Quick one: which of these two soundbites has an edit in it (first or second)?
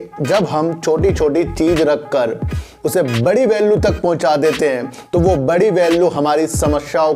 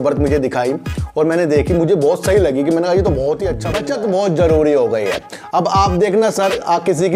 second